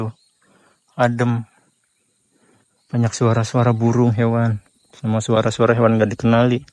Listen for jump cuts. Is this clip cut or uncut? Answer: uncut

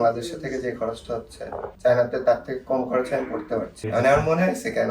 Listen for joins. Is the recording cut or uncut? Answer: cut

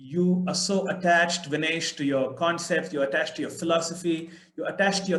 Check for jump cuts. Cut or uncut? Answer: uncut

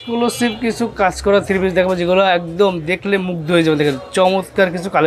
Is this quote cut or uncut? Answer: uncut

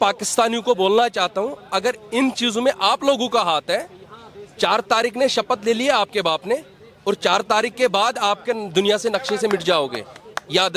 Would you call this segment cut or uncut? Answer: uncut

